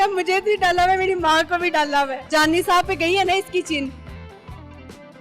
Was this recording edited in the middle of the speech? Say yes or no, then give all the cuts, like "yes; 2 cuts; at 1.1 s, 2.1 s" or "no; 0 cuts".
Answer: yes; 1 cut; at 2.2 s